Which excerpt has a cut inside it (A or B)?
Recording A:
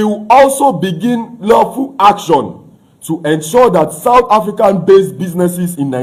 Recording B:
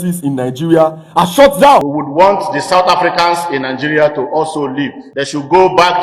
B